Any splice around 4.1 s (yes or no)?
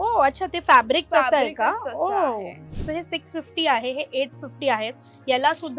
no